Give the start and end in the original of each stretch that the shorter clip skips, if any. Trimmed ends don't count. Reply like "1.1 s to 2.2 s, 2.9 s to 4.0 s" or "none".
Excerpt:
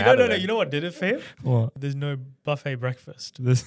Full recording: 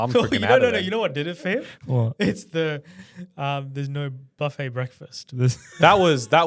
2.1 s to 3.6 s